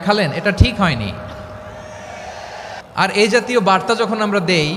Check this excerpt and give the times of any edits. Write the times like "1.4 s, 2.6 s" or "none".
2.8 s